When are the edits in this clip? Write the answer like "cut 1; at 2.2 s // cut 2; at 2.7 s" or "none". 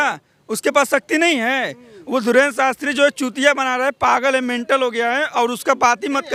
none